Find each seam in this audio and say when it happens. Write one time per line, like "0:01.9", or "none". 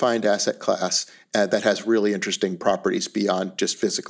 none